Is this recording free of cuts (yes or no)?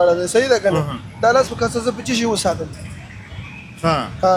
yes